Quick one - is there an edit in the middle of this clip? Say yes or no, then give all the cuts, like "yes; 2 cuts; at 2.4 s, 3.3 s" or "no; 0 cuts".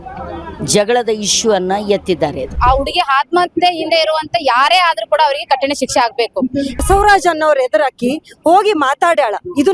yes; 2 cuts; at 2.5 s, 6.7 s